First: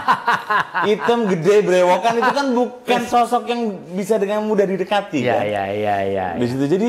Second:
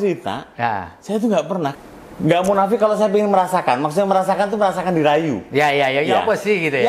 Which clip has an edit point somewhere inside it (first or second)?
second